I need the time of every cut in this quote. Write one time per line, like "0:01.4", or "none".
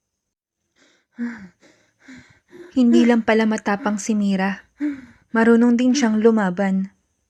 none